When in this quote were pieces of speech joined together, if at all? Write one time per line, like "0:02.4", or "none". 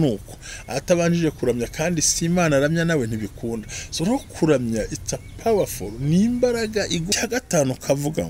0:07.1